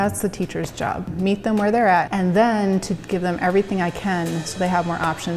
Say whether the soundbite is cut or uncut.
cut